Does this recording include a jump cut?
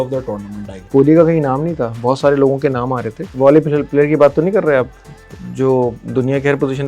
yes; 2 cuts; at 0.9 s, 3.3 s

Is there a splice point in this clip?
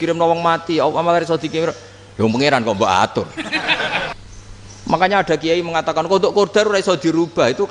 yes; 1 cut; at 4.1 s

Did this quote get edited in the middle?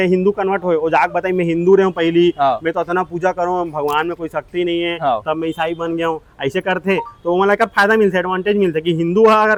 no; 0 cuts

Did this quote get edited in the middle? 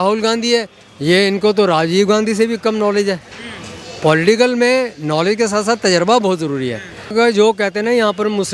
yes; 1 cut; at 7.1 s

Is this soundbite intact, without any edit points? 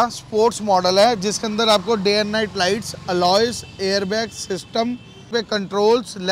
no; 1 cut; at 5.3 s

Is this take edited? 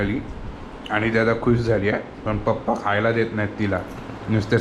no; 0 cuts

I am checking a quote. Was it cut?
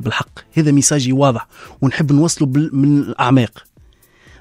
no; 0 cuts

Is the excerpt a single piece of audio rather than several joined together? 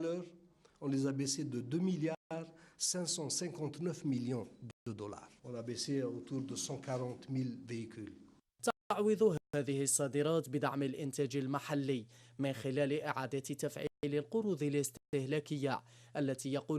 no; 1 cut; at 8.8 s

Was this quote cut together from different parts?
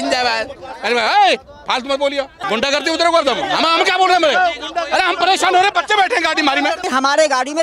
yes; 2 cuts; at 2.4 s, 6.9 s

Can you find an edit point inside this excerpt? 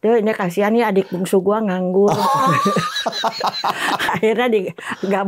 yes; 1 cut; at 4.1 s

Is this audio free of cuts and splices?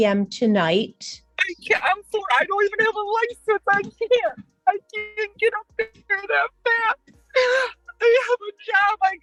yes; 0 cuts

